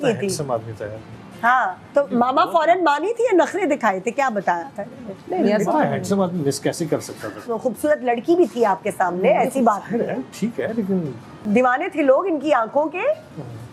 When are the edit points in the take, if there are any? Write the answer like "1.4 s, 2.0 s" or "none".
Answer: 7.4 s, 11.4 s